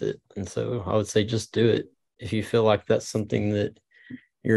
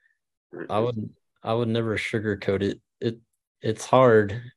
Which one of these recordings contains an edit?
first; 1 cut; at 2.0 s

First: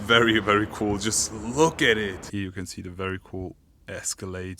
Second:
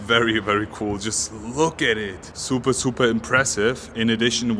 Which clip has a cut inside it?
first; 1 cut; at 2.3 s

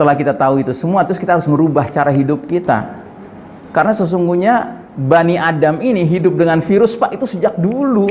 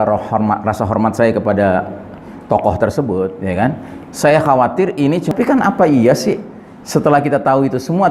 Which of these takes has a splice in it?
second; 1 cut; at 5.3 s

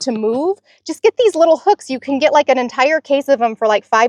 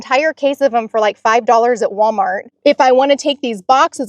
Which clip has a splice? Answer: second; 1 cut; at 2.5 s

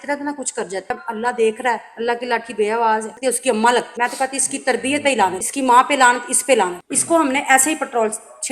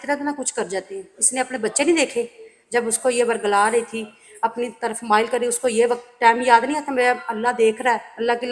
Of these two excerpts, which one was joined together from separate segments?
first; 4 cuts; at 1.0 s, 3.1 s, 3.9 s, 6.9 s

